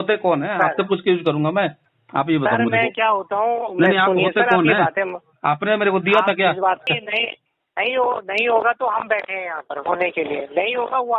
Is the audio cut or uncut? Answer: cut